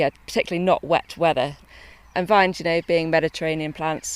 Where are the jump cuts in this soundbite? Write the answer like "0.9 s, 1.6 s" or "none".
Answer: 1.6 s